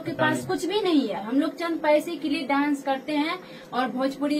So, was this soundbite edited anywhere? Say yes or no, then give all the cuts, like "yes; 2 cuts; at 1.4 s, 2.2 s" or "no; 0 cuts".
no; 0 cuts